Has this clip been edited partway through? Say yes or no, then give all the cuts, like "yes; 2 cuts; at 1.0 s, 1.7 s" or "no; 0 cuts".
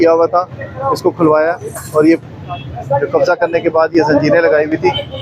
no; 0 cuts